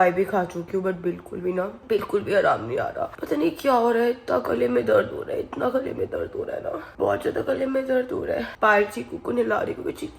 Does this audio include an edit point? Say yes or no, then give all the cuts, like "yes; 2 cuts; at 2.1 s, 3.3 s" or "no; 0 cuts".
no; 0 cuts